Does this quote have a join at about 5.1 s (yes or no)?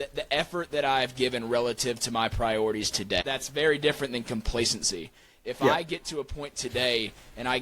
no